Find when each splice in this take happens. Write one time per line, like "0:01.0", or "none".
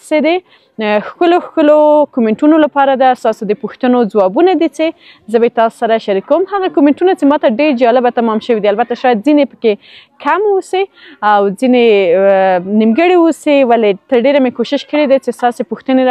none